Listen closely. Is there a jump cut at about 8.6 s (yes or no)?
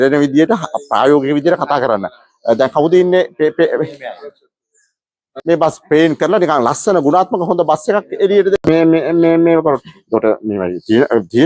yes